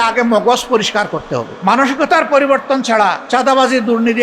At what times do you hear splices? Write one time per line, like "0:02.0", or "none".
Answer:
0:01.4
0:03.2